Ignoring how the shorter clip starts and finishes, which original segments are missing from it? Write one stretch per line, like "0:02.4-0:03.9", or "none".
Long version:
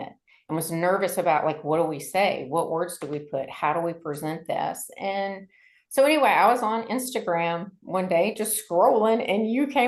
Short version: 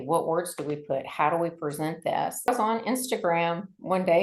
0:04.9-0:06.5